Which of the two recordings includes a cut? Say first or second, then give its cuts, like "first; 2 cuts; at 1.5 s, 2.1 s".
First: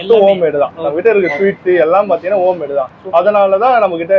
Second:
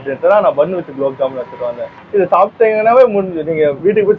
second; 1 cut; at 1.9 s